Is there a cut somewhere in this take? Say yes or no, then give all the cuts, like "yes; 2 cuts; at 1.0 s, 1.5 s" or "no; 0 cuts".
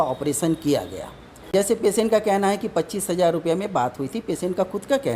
yes; 1 cut; at 1.5 s